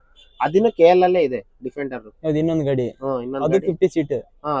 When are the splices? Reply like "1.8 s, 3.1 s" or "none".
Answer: none